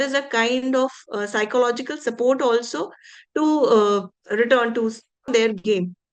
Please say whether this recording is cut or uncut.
cut